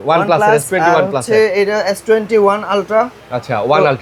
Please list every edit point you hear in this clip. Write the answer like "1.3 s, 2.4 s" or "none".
none